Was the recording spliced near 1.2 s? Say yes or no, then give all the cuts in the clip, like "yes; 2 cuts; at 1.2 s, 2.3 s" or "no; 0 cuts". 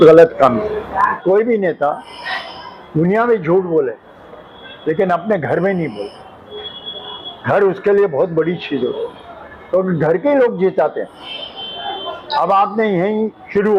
yes; 1 cut; at 1.2 s